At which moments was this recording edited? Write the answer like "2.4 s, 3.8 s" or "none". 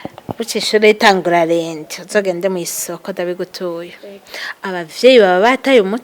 none